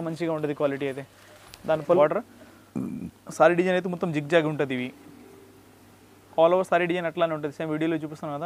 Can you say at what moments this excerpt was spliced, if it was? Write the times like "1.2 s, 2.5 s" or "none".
2.0 s